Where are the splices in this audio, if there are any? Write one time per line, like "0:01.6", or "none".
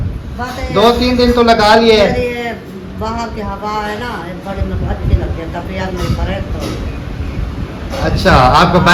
none